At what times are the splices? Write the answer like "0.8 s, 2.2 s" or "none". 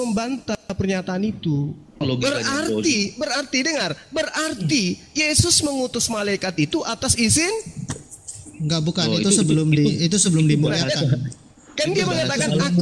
2.0 s